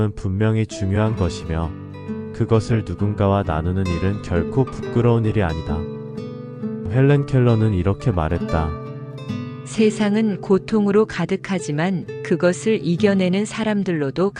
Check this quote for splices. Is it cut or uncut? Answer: uncut